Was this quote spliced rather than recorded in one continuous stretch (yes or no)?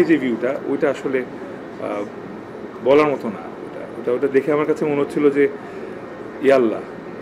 no